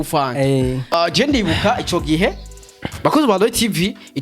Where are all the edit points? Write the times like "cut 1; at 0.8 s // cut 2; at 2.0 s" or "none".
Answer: cut 1; at 0.9 s

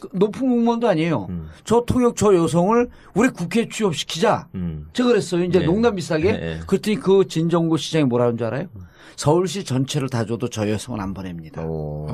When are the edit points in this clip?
none

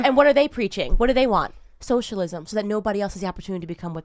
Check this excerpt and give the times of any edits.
none

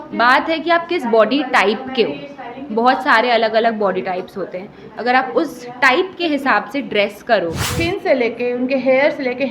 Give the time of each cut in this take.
cut 1; at 7.6 s

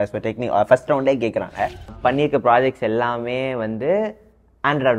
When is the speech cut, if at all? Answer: cut 1; at 1.9 s

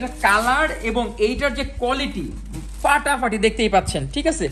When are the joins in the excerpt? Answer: none

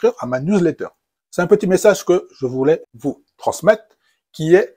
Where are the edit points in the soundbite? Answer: cut 1; at 0.8 s // cut 2; at 2.9 s

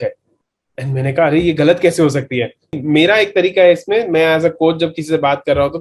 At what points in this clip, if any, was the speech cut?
cut 1; at 2.6 s

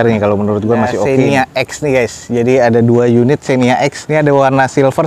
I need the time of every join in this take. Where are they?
cut 1; at 1.0 s // cut 2; at 4.0 s

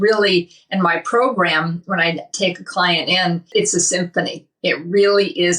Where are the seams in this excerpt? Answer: cut 1; at 3.5 s

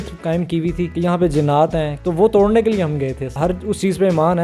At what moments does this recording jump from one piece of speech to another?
cut 1; at 0.9 s // cut 2; at 1.9 s // cut 3; at 3.3 s

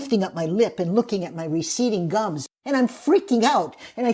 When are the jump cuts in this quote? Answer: cut 1; at 2.5 s

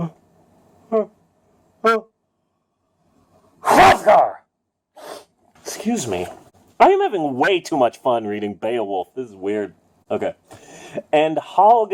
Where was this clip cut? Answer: none

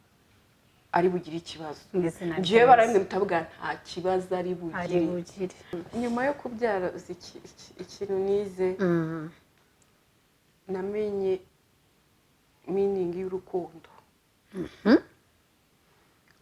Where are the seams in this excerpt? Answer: cut 1; at 5.8 s

